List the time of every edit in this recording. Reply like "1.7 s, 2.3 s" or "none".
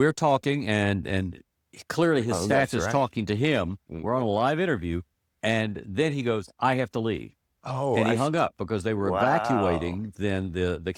none